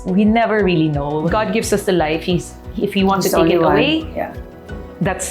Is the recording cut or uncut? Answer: cut